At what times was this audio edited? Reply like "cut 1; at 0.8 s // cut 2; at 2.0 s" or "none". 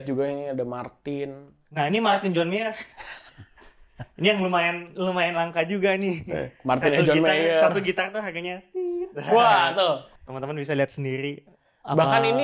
none